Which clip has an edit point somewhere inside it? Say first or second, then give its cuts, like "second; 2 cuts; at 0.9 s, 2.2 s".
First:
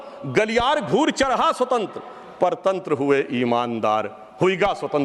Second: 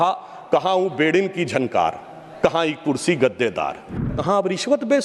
second; 1 cut; at 4.1 s